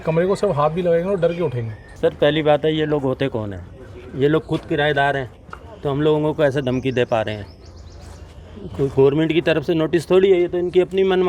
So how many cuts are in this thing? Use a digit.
1